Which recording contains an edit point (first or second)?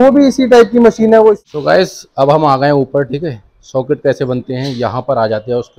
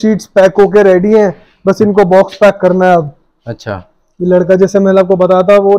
first